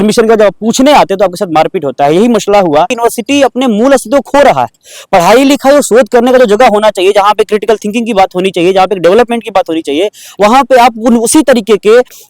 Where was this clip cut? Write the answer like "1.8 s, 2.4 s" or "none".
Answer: 2.9 s